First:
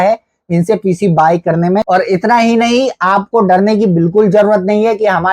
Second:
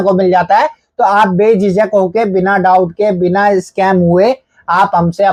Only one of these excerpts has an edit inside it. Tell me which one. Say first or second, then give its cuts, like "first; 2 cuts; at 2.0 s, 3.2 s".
first; 1 cut; at 1.8 s